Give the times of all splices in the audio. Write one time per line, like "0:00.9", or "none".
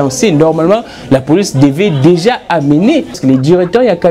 0:03.2